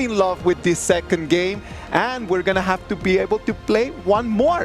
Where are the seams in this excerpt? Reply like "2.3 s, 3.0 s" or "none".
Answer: none